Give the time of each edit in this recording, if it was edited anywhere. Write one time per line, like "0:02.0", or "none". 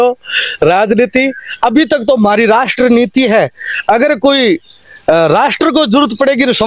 none